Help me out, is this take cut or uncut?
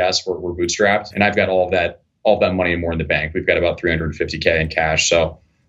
cut